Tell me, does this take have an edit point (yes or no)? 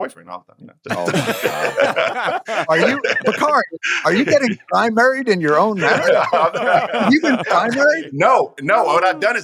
no